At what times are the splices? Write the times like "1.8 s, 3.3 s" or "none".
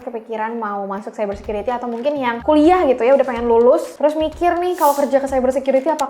2.4 s, 3.9 s